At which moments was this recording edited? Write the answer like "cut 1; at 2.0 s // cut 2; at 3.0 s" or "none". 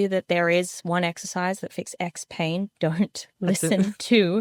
none